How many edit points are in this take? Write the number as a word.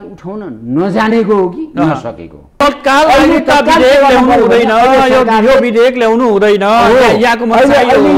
one